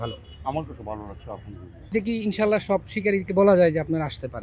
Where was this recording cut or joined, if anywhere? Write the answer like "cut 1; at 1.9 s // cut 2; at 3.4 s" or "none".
cut 1; at 1.9 s